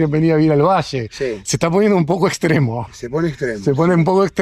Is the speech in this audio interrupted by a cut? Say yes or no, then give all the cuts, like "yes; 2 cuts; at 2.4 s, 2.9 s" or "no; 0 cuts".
no; 0 cuts